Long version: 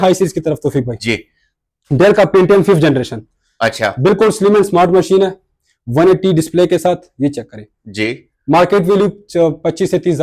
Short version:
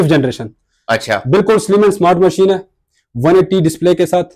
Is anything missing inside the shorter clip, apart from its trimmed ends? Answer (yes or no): no